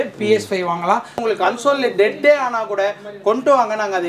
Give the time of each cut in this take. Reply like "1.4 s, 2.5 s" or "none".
1.2 s